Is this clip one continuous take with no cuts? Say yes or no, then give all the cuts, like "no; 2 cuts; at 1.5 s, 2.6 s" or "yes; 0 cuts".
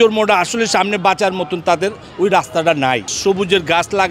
no; 1 cut; at 3.1 s